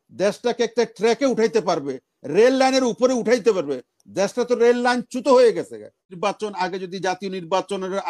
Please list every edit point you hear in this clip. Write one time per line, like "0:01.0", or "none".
0:06.1